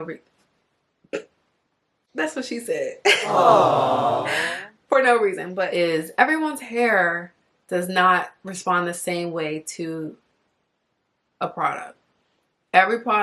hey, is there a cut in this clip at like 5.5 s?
yes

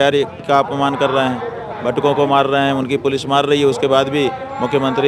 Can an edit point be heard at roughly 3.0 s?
no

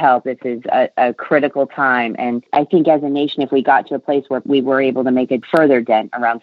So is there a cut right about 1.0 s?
no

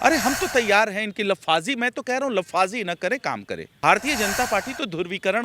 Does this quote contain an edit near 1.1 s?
no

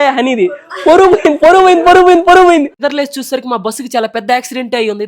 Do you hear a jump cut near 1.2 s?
no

